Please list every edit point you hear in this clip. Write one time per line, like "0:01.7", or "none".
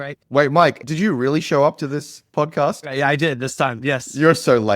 0:00.8
0:02.9